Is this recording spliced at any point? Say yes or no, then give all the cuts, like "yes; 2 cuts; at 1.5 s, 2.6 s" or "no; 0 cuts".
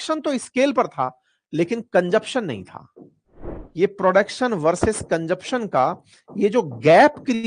no; 0 cuts